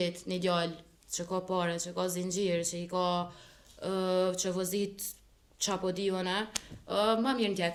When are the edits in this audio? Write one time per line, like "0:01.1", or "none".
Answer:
none